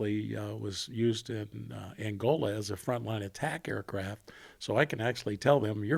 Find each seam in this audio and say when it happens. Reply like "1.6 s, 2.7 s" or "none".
none